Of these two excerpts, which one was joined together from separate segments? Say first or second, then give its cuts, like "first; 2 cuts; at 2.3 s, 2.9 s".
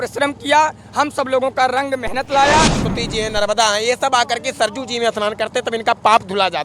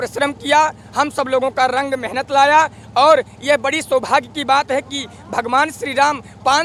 first; 1 cut; at 2.8 s